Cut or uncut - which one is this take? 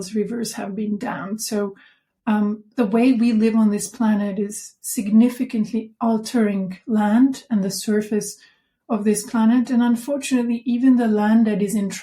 uncut